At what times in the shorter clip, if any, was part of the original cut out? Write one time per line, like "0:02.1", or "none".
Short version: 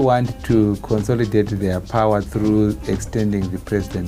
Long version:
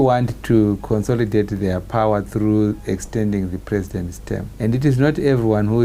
none